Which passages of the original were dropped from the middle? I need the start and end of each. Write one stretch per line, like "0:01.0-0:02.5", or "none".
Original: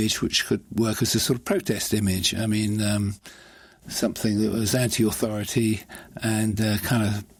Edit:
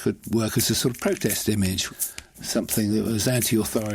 0:02.3-0:03.3

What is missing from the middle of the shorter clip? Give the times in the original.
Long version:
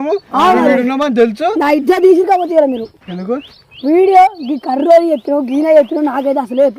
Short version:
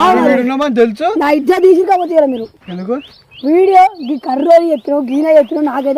none

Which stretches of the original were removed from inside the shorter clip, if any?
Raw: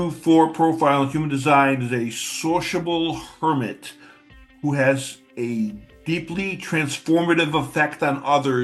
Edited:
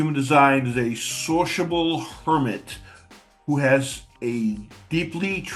none

